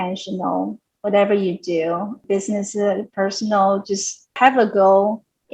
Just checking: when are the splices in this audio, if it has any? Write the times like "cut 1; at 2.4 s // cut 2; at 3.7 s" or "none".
cut 1; at 2.2 s